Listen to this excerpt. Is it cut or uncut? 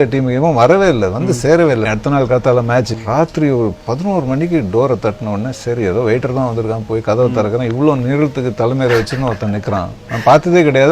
cut